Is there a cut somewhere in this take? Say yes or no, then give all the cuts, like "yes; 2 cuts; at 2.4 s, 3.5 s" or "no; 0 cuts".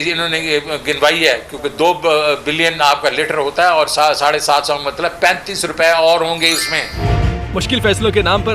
yes; 1 cut; at 7.0 s